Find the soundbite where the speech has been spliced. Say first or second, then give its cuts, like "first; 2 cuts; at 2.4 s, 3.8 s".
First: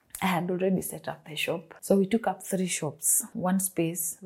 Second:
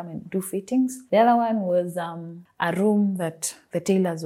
first; 2 cuts; at 1.7 s, 3.2 s